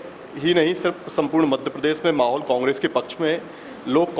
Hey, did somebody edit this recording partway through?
no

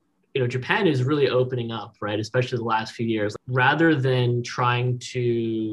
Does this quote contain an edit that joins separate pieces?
yes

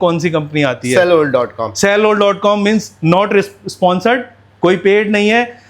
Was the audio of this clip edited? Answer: no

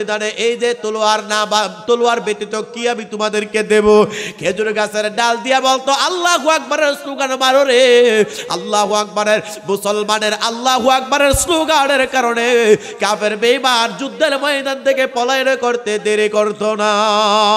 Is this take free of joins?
yes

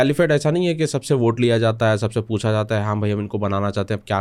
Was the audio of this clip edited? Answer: no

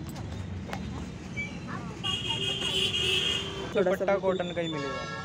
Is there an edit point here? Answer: yes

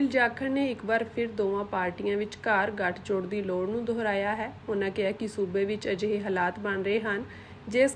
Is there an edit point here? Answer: no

